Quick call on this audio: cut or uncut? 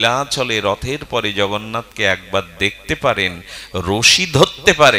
uncut